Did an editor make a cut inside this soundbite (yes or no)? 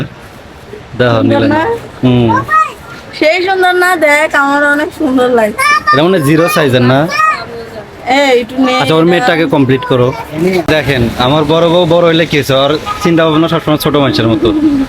yes